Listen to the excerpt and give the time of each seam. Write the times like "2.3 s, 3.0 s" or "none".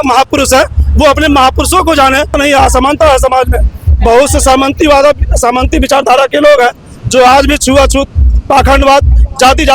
2.4 s